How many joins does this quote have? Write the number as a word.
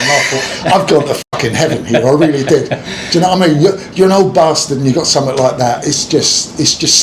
zero